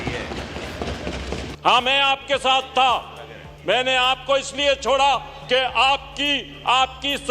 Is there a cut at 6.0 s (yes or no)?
no